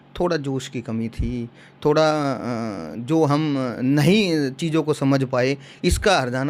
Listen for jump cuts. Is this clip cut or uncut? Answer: uncut